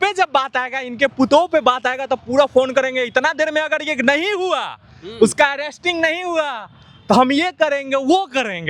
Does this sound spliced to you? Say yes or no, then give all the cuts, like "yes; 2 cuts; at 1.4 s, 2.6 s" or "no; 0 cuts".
no; 0 cuts